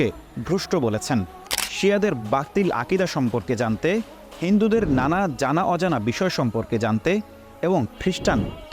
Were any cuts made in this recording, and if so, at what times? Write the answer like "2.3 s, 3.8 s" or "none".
1.4 s